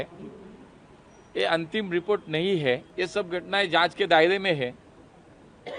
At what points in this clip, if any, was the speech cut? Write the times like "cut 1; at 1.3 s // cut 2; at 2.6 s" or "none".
cut 1; at 2.9 s